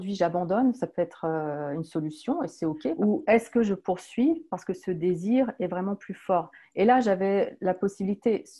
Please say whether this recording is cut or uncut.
cut